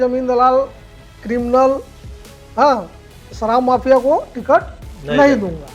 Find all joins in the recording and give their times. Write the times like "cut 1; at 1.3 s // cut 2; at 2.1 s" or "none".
none